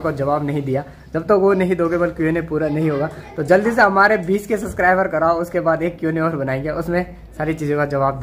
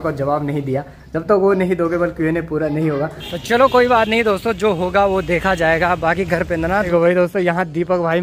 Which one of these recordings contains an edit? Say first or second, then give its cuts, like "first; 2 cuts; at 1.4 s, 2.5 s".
second; 2 cuts; at 3.5 s, 6.9 s